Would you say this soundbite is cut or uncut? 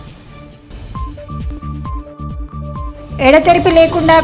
cut